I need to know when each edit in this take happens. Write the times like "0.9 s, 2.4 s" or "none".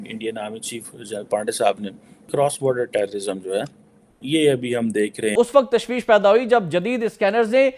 2.3 s, 5.3 s